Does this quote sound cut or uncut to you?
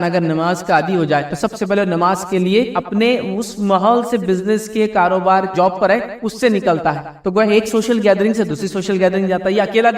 cut